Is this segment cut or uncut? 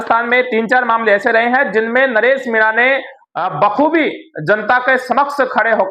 uncut